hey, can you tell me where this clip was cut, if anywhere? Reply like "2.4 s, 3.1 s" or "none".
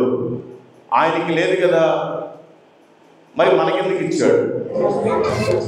4.8 s